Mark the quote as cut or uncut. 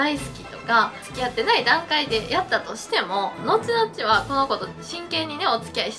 cut